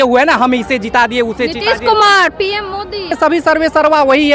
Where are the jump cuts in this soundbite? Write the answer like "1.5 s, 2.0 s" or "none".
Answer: 3.1 s